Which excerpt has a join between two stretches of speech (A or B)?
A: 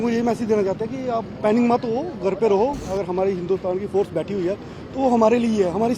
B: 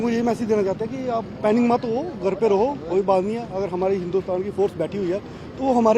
A